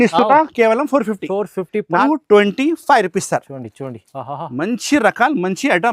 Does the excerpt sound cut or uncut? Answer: cut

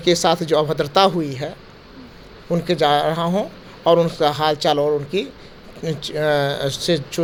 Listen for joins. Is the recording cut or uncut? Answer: uncut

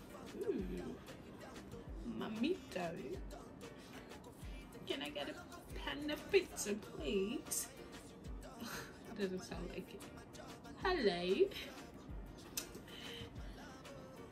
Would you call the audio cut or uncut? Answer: uncut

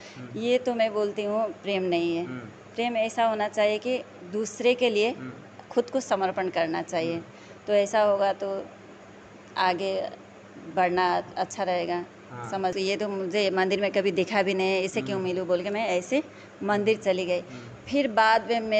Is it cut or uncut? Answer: cut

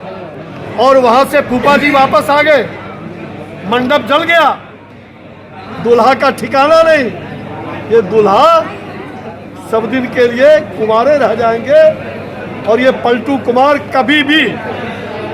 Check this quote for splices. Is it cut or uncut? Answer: uncut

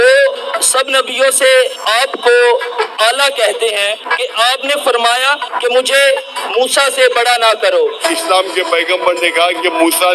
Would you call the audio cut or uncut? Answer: cut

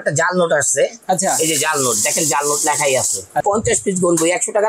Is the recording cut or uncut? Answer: cut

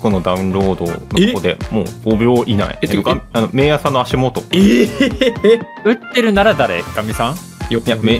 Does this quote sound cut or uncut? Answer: cut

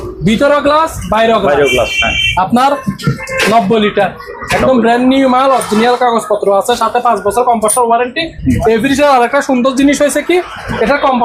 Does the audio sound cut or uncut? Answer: uncut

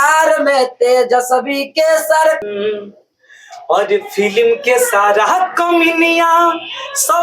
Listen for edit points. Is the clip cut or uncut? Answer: cut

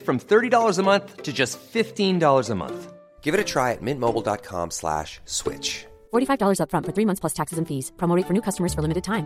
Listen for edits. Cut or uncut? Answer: uncut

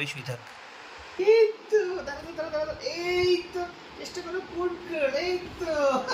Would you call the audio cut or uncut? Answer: cut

